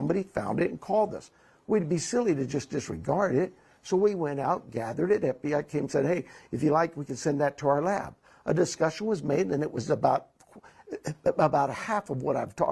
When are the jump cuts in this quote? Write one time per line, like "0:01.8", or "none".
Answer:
0:08.7